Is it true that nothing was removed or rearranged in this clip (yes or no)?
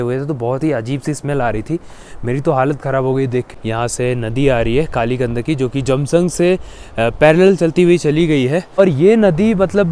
no